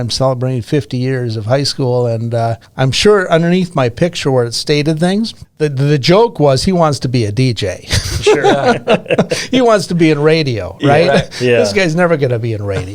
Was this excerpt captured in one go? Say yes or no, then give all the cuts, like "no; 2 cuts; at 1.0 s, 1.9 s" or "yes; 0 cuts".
no; 2 cuts; at 2.6 s, 5.4 s